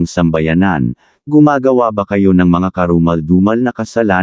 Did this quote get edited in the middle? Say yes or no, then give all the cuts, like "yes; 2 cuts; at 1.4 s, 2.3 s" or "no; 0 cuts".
no; 0 cuts